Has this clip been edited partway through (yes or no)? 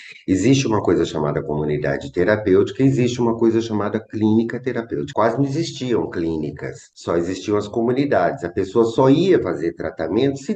yes